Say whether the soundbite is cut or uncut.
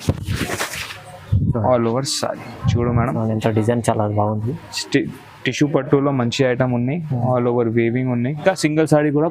cut